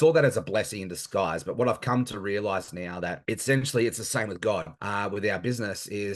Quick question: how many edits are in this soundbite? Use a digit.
2